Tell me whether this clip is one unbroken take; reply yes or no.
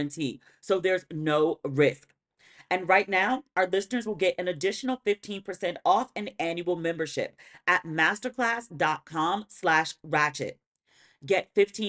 yes